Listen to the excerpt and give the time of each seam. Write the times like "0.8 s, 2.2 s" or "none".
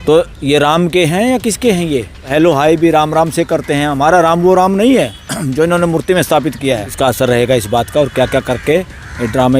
2.3 s, 6.9 s

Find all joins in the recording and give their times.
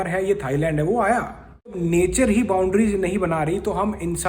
1.8 s

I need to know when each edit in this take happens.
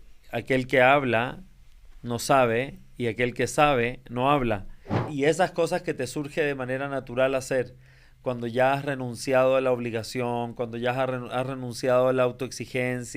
5.1 s

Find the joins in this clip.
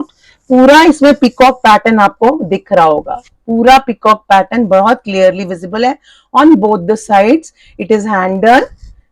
none

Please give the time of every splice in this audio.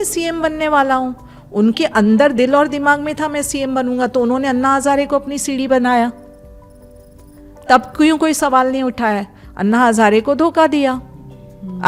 none

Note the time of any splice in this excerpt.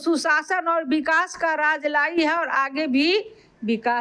none

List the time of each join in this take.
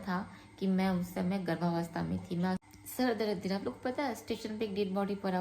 2.6 s

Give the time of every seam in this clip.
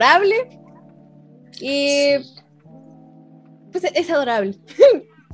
none

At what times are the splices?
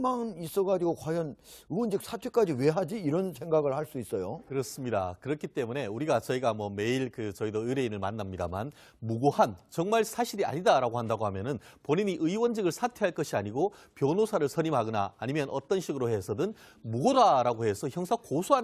16.4 s

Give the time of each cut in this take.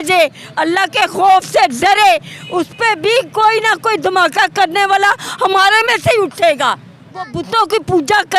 7.4 s

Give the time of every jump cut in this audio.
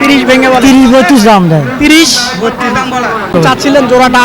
3.3 s

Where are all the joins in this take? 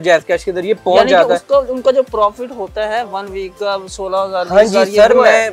none

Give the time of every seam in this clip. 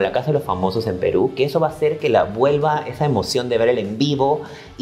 none

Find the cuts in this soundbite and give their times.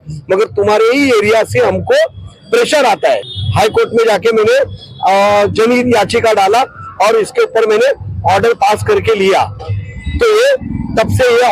3.4 s

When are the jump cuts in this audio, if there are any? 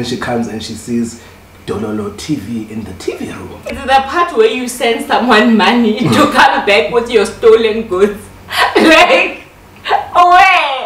3.9 s

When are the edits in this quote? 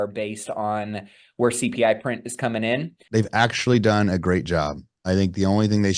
2.9 s

